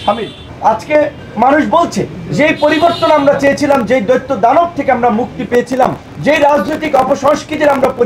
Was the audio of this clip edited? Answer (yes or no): yes